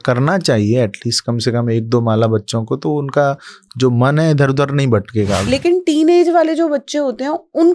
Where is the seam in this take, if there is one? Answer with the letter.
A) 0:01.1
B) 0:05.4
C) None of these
B